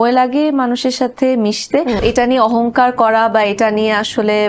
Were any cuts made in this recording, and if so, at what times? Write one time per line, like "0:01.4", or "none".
0:02.0